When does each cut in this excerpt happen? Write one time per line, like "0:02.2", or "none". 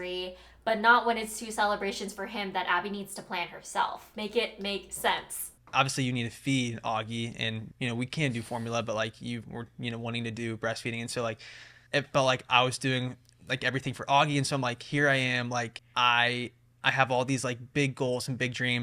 0:05.4